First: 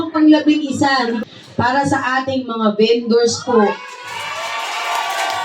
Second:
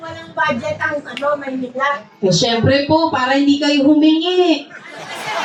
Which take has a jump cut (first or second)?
first